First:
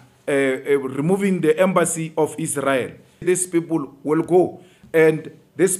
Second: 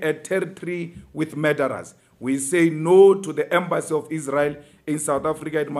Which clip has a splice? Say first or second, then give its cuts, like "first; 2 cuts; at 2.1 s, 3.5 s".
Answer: first; 1 cut; at 3.2 s